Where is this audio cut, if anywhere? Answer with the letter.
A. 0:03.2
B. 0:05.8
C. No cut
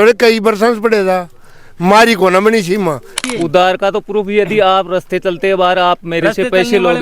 A